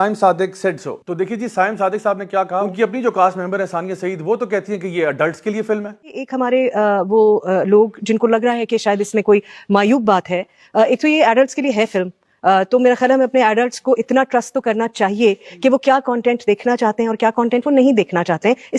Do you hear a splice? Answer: no; 0 cuts

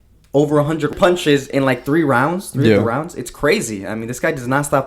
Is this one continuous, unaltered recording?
no; 1 cut; at 0.9 s

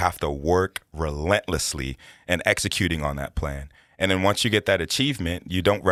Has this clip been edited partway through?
no; 0 cuts

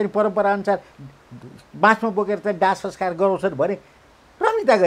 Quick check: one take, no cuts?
yes; 0 cuts

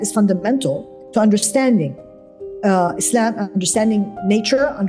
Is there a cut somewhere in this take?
no; 0 cuts

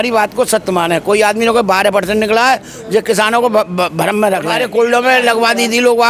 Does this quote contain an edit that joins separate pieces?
yes; 1 cut; at 4.6 s

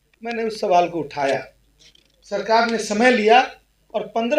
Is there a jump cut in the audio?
no; 0 cuts

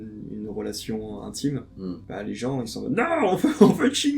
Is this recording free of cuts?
yes; 0 cuts

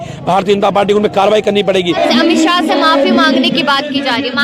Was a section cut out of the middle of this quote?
yes; 1 cut; at 2.0 s

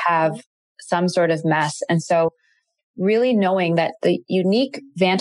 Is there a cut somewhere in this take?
yes; 1 cut; at 4.0 s

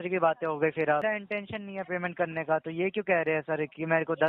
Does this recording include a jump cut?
yes; 1 cut; at 1.2 s

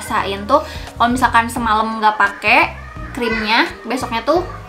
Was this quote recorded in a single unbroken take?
yes; 0 cuts

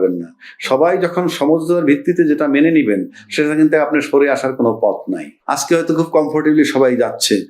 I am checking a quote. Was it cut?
yes; 1 cut; at 5.4 s

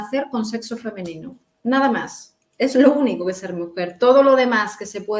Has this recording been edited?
no; 0 cuts

